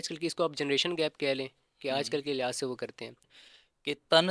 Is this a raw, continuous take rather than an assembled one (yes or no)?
no